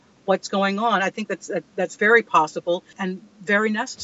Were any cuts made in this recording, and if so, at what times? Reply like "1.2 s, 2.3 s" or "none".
2.9 s

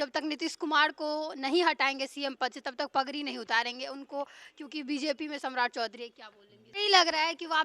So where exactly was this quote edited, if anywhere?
6.5 s

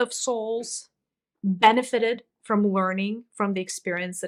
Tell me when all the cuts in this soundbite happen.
none

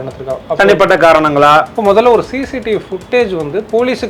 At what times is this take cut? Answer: none

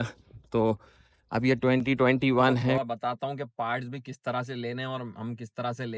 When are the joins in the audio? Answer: 2.8 s

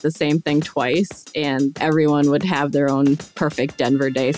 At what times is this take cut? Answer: 1.8 s, 3.2 s

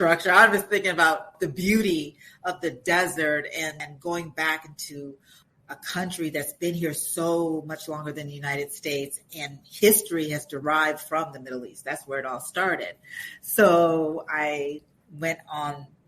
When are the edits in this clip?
1.3 s

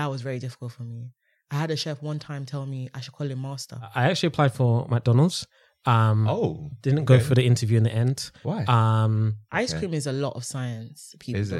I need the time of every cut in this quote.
3.9 s, 9.4 s

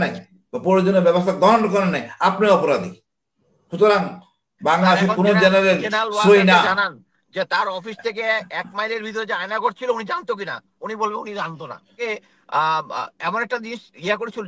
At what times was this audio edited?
12.0 s

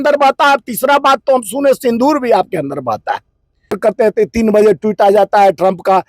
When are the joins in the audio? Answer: 3.8 s

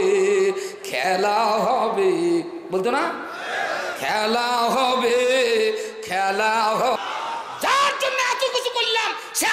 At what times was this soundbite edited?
7.0 s

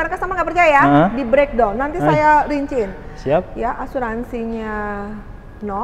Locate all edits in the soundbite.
none

